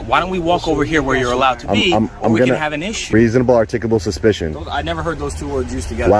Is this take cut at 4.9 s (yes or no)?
no